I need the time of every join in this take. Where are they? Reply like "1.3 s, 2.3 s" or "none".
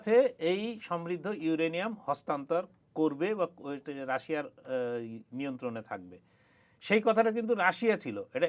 none